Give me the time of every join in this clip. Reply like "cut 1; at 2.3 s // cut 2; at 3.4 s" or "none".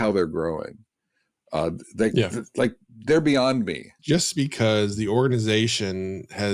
cut 1; at 3.9 s